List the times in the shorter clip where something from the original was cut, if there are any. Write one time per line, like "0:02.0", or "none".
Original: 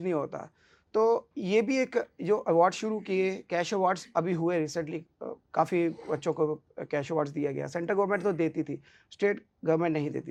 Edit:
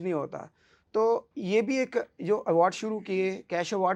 none

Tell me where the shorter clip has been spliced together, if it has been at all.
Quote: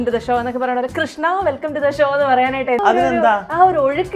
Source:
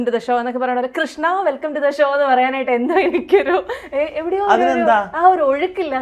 0:02.8

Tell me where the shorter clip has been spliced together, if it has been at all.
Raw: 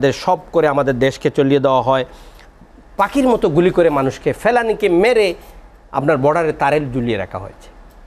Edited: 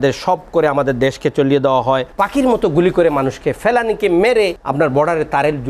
0:02.1
0:04.6

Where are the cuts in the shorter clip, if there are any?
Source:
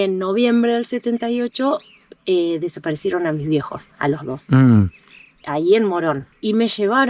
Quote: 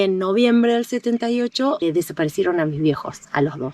0:01.8

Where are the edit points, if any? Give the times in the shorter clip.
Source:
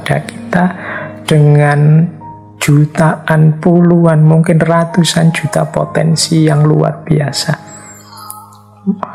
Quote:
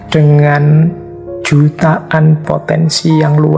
0:02.4

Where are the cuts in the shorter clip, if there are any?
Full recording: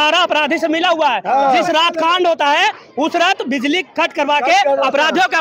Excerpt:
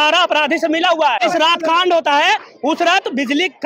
0:01.2

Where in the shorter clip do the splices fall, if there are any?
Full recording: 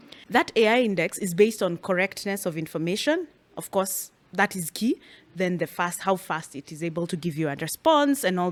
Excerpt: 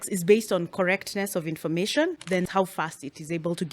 0:02.4

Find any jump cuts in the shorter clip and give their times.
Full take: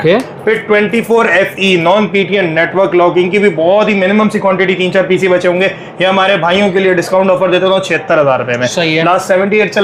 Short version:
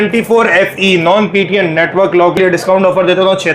0:02.4

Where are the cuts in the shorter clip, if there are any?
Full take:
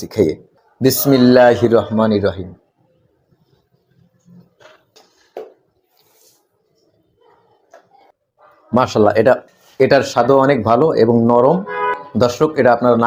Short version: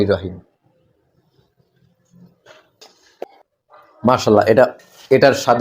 0:03.2

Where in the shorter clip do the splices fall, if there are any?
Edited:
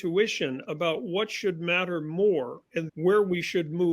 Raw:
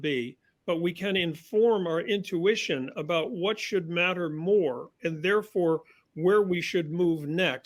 0:02.8

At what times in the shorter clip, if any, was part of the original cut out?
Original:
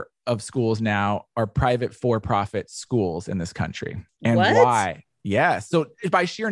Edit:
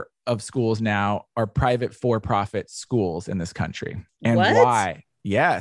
none

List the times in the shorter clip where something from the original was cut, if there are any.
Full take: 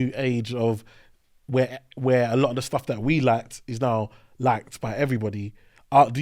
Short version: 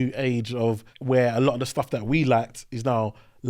0:00.9

